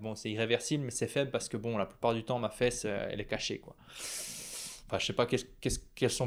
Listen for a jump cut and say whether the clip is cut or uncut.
uncut